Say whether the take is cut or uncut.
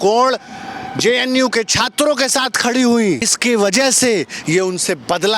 cut